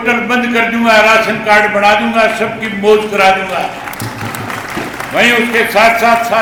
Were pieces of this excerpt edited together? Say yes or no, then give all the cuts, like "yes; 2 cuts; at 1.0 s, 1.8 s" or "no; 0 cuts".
no; 0 cuts